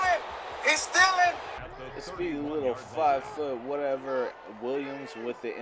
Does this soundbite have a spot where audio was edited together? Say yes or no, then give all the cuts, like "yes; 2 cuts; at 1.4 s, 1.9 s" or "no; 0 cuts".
yes; 1 cut; at 1.5 s